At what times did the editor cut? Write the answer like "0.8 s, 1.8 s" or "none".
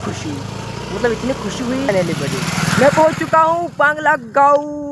1.9 s

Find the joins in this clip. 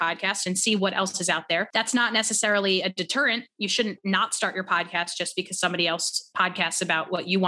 1.7 s

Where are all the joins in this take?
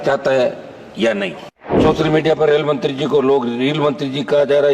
1.4 s

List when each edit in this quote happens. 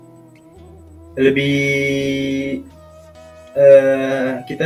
none

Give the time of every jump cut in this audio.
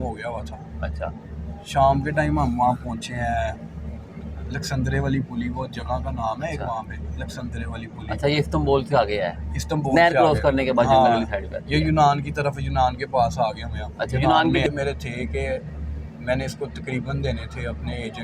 14.7 s

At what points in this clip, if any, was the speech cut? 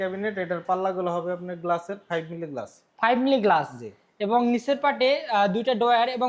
none

